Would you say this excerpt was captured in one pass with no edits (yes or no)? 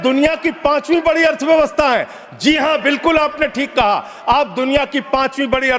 yes